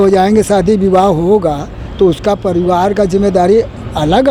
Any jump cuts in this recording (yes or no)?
no